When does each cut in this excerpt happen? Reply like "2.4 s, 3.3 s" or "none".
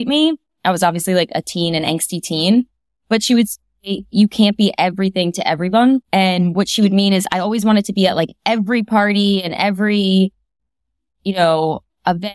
6.1 s